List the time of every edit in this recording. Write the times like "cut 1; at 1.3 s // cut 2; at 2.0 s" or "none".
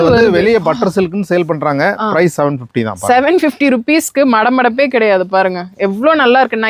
none